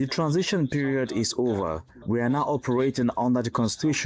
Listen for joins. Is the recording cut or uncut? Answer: cut